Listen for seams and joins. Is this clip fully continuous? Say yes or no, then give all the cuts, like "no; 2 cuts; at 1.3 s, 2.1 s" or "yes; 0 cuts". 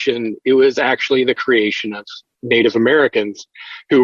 yes; 0 cuts